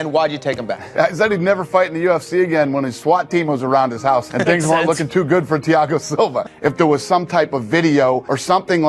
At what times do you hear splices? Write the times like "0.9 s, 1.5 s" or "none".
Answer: none